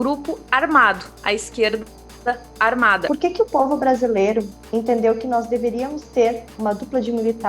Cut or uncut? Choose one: cut